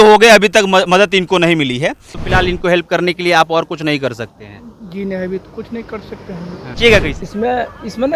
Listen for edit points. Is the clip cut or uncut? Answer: cut